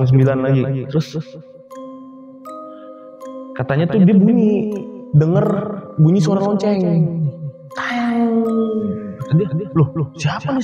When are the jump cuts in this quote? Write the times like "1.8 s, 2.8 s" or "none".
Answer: none

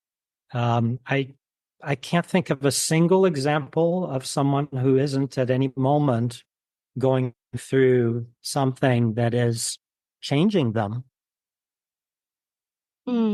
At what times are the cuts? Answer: none

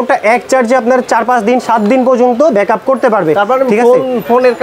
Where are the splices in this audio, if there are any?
none

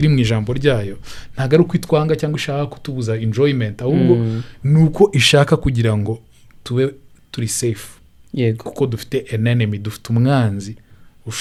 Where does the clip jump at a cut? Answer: none

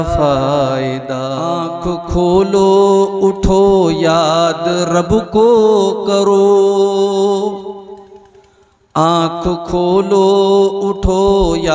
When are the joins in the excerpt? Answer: 1.5 s

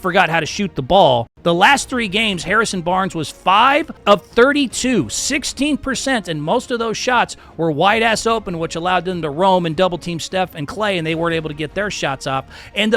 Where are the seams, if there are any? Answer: 1.3 s, 3.9 s

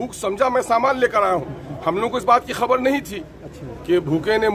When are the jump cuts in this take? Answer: none

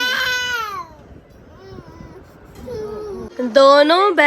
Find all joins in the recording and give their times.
3.2 s

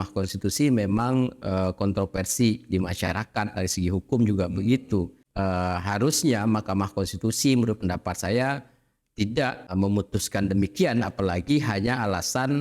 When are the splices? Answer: 5.2 s, 9.7 s

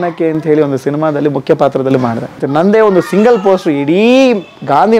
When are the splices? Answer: 2.4 s

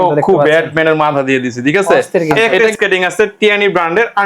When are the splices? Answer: 2.7 s

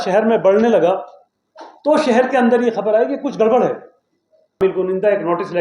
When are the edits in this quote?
4.6 s

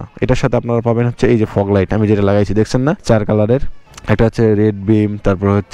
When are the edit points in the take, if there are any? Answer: 3.0 s

